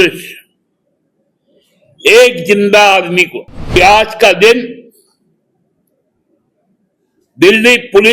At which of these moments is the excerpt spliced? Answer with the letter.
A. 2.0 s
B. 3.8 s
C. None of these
B